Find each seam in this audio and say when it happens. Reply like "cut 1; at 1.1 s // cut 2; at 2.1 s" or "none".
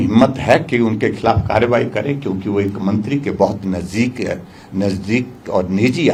none